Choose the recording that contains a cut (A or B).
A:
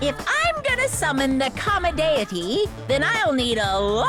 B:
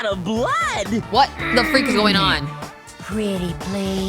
B